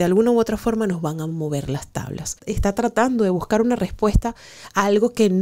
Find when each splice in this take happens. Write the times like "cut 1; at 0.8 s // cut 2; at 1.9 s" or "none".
cut 1; at 2.4 s